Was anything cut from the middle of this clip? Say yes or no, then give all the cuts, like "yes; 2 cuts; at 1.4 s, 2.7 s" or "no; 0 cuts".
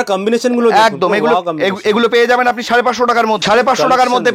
yes; 1 cut; at 3.4 s